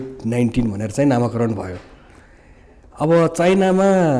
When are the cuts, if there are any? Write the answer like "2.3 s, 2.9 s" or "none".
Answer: none